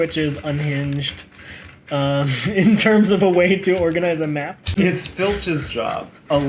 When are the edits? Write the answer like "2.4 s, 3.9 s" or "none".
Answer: 4.8 s